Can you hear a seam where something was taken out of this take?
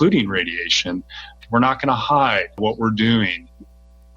yes; 1 cut; at 1.4 s

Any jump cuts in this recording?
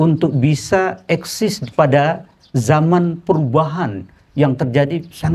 no; 0 cuts

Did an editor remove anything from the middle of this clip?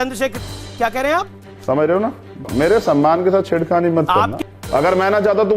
yes; 2 cuts; at 2.5 s, 4.3 s

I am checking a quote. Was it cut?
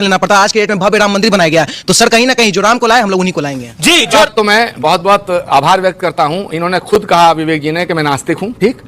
yes; 1 cut; at 4.2 s

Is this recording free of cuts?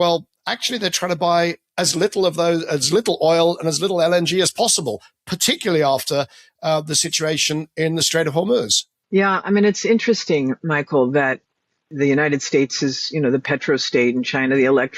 no; 1 cut; at 11.9 s

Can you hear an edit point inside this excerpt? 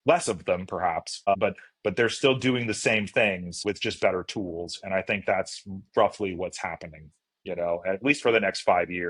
yes; 1 cut; at 1.4 s

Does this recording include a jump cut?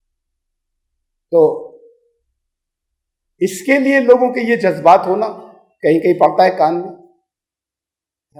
no; 0 cuts

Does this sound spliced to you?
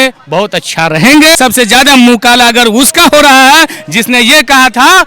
yes; 1 cut; at 1.4 s

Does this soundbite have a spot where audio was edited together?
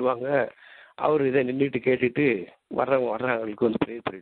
no; 0 cuts

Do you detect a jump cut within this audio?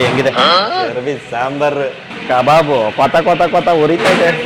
yes; 1 cut; at 2.1 s

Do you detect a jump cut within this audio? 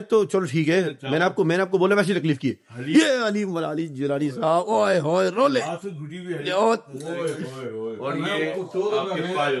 no; 0 cuts

